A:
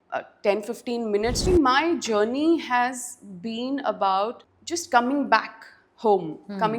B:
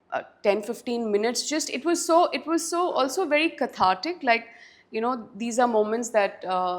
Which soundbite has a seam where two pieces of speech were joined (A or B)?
A